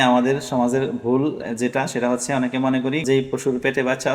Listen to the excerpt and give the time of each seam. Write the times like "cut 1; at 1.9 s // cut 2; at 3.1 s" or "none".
cut 1; at 3.0 s

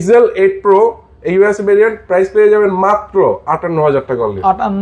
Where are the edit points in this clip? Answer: none

